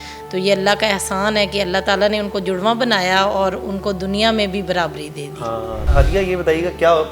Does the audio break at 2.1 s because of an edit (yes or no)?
no